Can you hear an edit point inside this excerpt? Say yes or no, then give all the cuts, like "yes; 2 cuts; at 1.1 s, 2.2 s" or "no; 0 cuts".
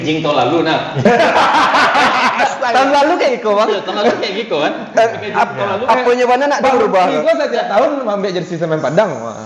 no; 0 cuts